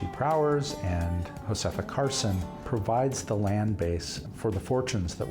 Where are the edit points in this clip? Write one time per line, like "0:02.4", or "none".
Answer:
0:01.3
0:02.5
0:04.2